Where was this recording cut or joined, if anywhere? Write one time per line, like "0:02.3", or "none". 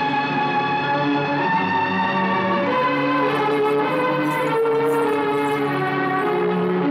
0:02.5